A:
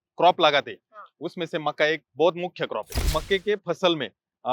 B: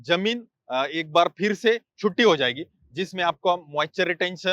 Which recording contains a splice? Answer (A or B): A